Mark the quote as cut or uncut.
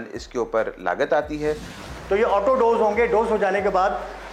cut